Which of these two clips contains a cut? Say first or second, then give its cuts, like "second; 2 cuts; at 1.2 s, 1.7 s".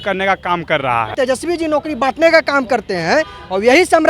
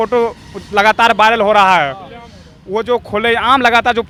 first; 1 cut; at 1.1 s